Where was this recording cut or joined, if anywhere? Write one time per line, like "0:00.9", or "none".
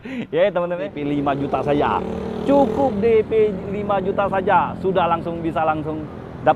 0:00.9